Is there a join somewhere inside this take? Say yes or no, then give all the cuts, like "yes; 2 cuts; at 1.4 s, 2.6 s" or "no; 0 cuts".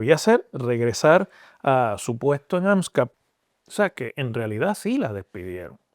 yes; 1 cut; at 3.1 s